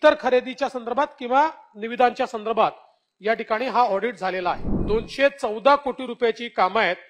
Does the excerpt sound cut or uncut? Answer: cut